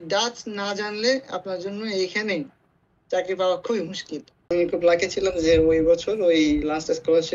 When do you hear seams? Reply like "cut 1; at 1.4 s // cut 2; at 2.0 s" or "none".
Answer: cut 1; at 4.5 s

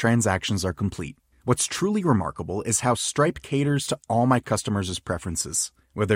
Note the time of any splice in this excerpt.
none

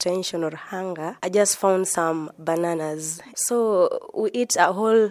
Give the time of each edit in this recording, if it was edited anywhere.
cut 1; at 3.3 s

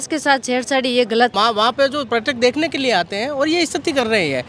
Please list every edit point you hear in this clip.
cut 1; at 1.3 s

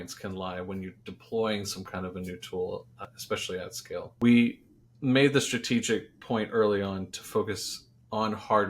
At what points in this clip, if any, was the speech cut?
cut 1; at 3.0 s // cut 2; at 4.1 s

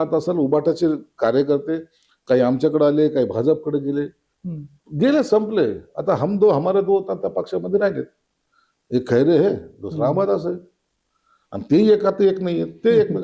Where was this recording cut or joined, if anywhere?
none

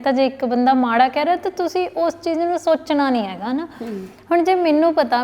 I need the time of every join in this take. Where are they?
none

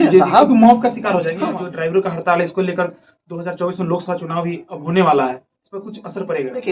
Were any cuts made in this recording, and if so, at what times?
cut 1; at 1.3 s

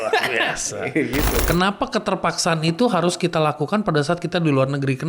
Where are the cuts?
cut 1; at 1.4 s

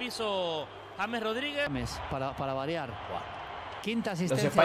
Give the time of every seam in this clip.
cut 1; at 1.7 s

